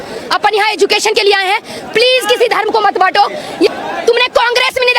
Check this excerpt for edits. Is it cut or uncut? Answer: cut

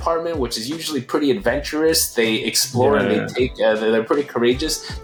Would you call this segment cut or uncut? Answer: uncut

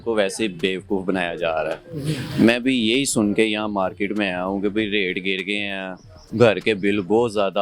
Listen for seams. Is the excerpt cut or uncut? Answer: uncut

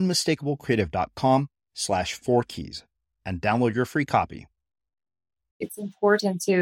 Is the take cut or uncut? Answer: cut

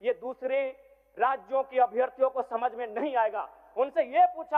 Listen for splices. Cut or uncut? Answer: uncut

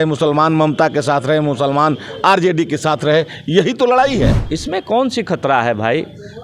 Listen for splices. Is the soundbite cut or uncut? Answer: cut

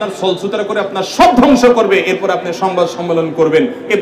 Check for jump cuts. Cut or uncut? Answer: uncut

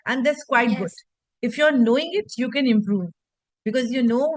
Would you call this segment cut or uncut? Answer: uncut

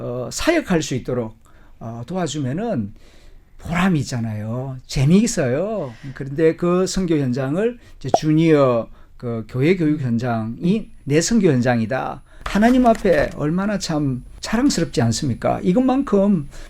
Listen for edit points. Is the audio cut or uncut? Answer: cut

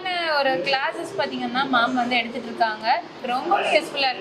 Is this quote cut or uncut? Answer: cut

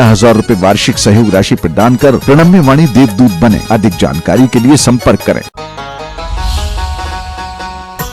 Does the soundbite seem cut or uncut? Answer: cut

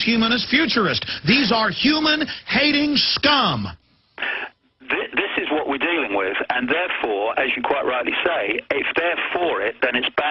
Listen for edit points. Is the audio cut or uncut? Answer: cut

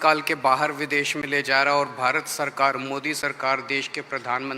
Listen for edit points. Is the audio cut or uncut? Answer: uncut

